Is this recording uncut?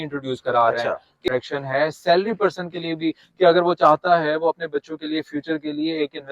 no; 1 cut; at 1.3 s

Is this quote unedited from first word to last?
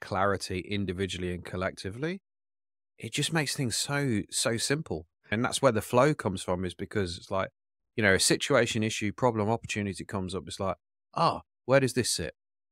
no; 1 cut; at 5.3 s

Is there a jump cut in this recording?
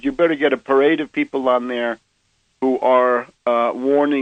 no; 0 cuts

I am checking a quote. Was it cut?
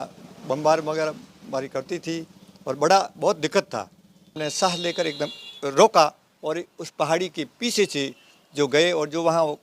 yes; 1 cut; at 4.3 s

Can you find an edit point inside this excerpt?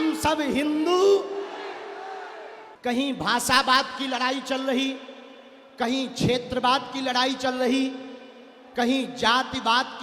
yes; 1 cut; at 2.6 s

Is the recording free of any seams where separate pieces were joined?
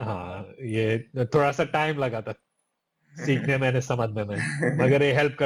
yes; 0 cuts

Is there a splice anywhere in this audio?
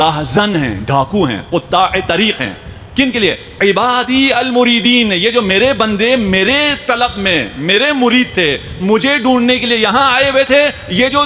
no; 0 cuts

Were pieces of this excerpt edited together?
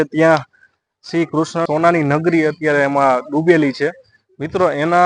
yes; 1 cut; at 1.7 s

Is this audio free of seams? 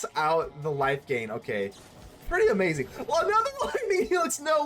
yes; 0 cuts

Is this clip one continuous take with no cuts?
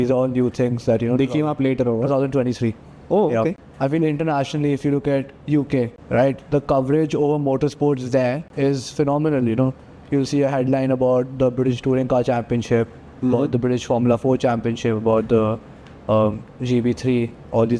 no; 3 cuts; at 3.7 s, 6.0 s, 8.5 s

